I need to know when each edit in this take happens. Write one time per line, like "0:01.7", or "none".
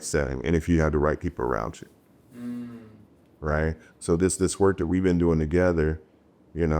none